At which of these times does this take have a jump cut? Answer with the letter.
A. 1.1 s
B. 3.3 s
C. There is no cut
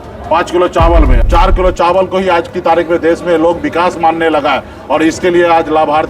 A